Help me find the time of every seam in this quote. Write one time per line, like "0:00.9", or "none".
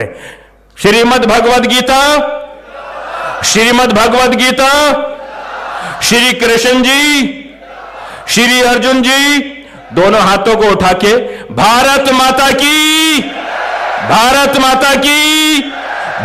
none